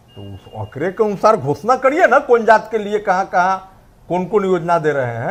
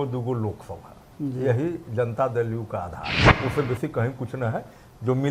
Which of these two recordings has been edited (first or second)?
second